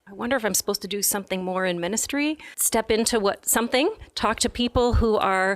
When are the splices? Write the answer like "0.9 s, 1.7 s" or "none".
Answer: 2.5 s